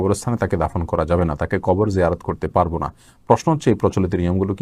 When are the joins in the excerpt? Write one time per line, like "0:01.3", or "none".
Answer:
none